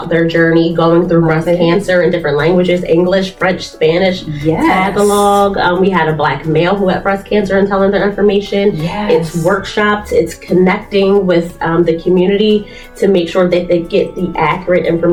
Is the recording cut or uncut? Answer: uncut